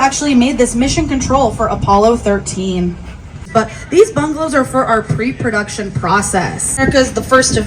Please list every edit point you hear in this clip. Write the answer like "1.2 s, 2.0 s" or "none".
3.5 s, 6.8 s